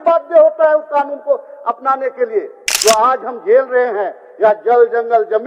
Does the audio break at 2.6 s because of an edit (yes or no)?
yes